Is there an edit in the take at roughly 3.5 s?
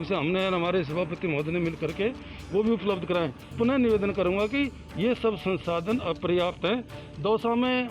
yes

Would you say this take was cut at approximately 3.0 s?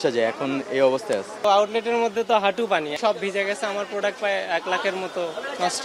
yes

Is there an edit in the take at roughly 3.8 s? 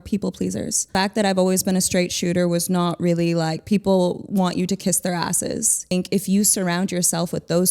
no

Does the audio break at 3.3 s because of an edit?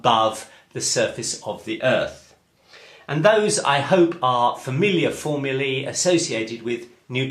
yes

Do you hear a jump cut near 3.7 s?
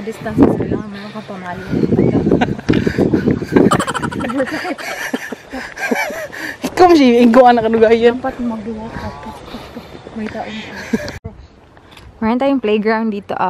no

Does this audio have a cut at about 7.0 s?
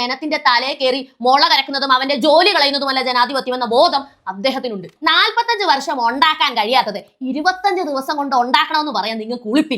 no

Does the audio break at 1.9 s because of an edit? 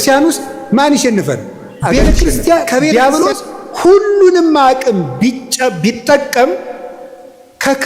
yes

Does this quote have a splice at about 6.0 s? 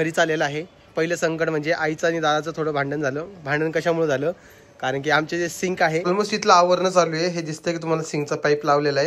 yes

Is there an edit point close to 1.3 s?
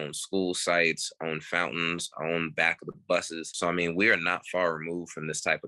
no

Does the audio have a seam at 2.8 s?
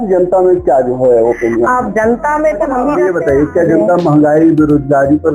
yes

